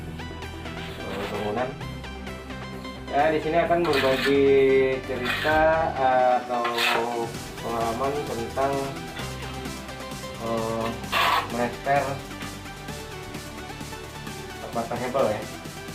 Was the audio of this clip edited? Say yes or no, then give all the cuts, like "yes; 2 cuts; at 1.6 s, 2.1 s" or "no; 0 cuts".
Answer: yes; 1 cut; at 1.0 s